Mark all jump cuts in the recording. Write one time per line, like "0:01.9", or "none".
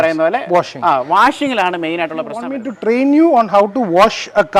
0:02.5